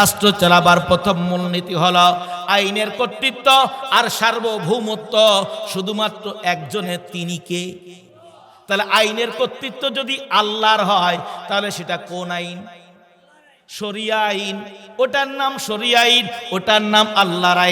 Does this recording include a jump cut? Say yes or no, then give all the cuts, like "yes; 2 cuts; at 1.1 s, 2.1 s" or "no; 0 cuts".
no; 0 cuts